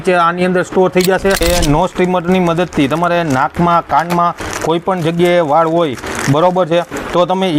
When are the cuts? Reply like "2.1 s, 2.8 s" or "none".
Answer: 1.4 s

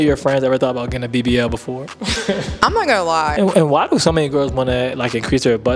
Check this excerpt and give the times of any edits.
3.4 s

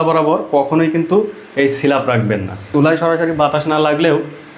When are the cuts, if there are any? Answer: 2.7 s

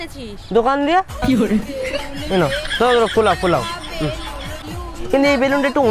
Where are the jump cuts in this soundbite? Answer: 4.6 s

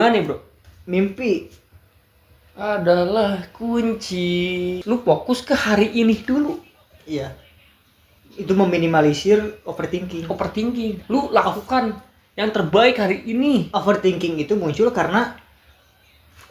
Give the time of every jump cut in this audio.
4.8 s

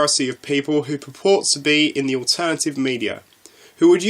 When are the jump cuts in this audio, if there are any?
none

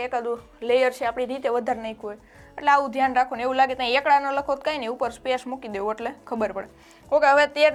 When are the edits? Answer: none

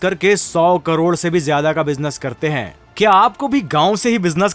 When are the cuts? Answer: none

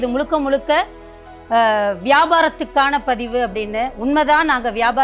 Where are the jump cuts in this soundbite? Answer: none

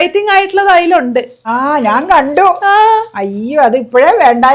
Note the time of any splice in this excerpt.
1.4 s

